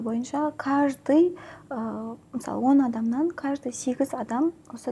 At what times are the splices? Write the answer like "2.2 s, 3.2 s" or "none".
none